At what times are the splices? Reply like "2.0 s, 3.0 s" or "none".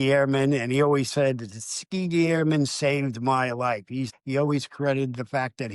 4.1 s